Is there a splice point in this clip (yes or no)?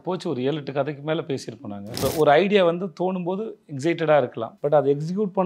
yes